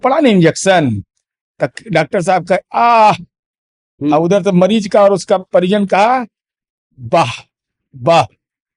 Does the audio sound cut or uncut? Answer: uncut